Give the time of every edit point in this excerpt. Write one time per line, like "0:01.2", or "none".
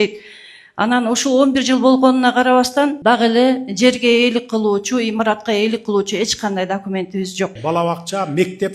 0:03.0
0:07.6